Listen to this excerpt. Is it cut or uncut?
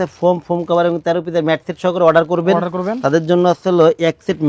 uncut